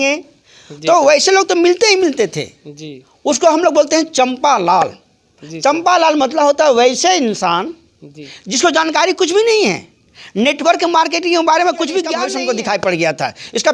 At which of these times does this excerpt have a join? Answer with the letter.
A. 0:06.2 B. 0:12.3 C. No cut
B